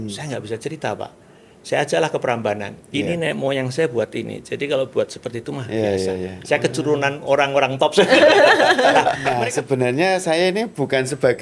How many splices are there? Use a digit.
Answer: 1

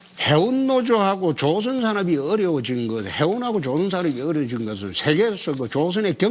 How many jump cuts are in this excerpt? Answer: 1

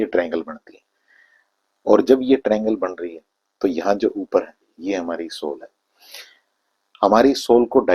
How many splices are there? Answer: 0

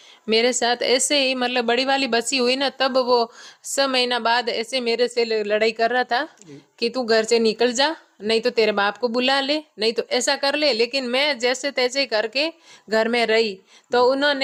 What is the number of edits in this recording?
0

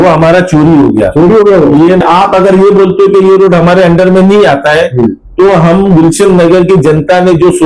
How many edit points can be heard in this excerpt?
1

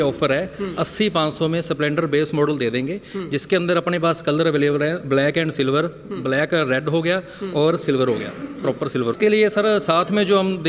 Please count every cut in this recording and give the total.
1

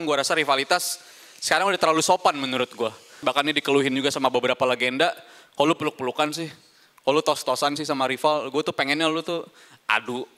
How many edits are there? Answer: 1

